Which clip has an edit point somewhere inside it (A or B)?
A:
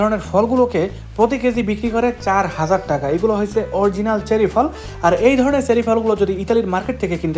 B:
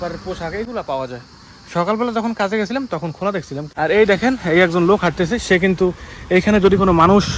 B